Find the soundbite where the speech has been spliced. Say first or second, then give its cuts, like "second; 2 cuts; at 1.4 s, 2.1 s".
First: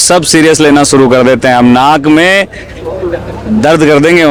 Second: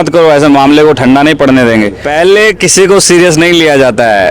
second; 1 cut; at 2.0 s